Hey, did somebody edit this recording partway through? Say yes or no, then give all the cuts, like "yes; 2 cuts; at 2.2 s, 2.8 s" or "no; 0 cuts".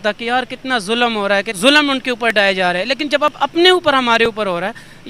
yes; 1 cut; at 1.5 s